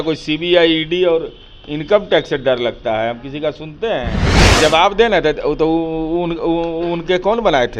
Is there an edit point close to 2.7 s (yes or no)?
no